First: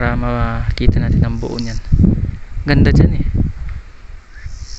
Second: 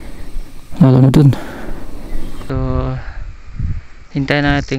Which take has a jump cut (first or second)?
second